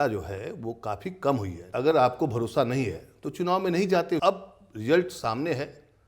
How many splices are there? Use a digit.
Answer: 2